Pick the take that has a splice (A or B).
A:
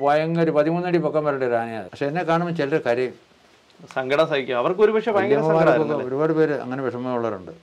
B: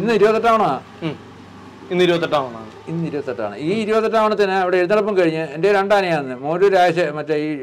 A